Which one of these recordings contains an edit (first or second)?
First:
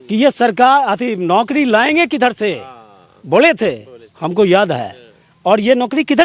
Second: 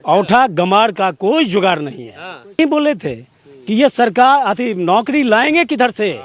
second